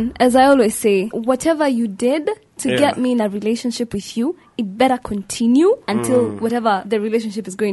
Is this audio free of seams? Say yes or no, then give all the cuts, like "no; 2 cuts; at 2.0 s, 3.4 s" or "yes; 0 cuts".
no; 1 cut; at 1.2 s